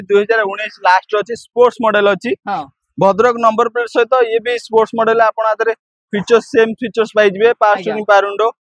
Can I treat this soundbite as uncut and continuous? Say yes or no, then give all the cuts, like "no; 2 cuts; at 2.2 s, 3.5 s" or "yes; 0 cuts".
yes; 0 cuts